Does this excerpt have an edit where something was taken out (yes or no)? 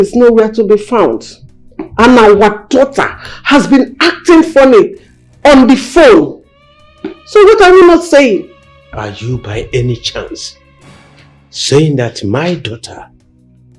no